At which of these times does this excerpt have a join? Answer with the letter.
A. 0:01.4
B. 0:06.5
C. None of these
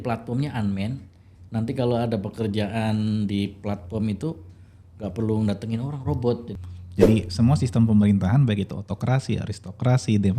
B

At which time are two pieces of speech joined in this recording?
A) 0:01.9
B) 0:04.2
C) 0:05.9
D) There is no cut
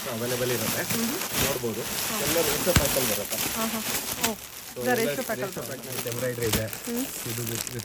C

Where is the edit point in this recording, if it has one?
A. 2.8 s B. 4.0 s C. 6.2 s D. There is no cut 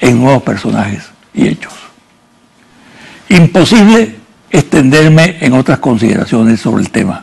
C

